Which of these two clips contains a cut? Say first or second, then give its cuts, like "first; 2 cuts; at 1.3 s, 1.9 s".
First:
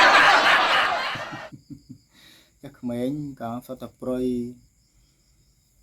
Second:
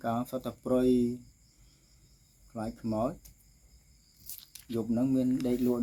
first; 1 cut; at 1.6 s